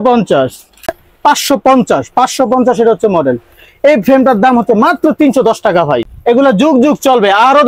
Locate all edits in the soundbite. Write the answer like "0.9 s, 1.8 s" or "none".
1.1 s, 6.1 s